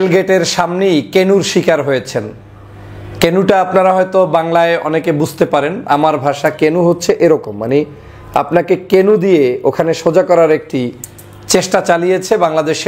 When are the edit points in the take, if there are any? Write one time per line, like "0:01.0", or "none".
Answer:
none